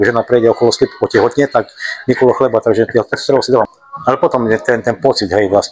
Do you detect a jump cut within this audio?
yes; 1 cut; at 3.7 s

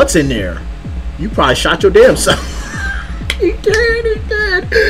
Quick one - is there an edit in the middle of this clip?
no; 0 cuts

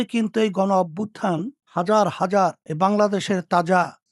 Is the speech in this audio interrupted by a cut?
no; 0 cuts

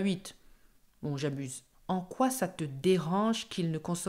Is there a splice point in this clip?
yes; 1 cut; at 1.6 s

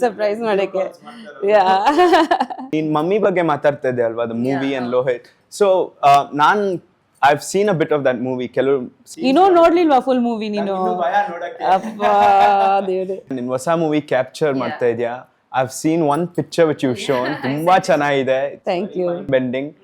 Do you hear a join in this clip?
yes; 2 cuts; at 2.6 s, 13.3 s

